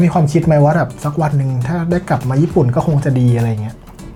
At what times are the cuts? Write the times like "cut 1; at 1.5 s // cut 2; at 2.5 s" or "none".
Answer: none